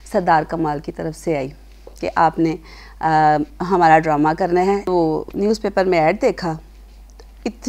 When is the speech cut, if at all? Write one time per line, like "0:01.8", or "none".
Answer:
0:04.9